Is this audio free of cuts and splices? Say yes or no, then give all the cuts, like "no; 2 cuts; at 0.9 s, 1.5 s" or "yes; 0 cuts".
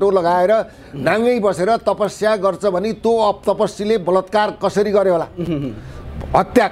yes; 0 cuts